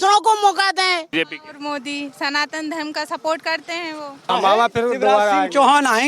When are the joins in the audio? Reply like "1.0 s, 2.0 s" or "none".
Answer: 1.1 s, 4.3 s